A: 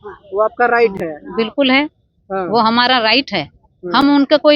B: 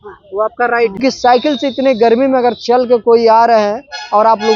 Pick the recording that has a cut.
B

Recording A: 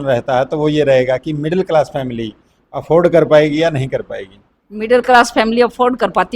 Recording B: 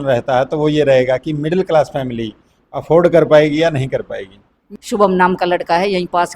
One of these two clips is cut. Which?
B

